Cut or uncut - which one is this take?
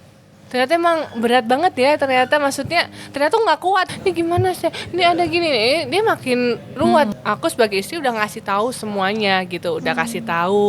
cut